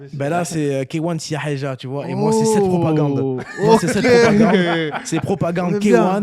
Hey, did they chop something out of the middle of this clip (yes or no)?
no